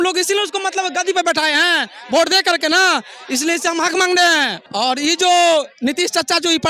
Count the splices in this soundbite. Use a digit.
1